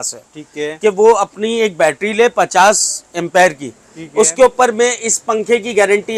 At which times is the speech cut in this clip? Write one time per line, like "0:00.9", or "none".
none